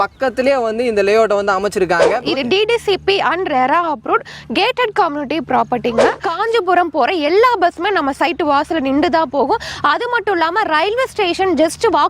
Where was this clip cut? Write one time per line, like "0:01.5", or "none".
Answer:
0:02.2
0:06.2